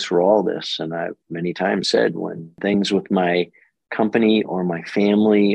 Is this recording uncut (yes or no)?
no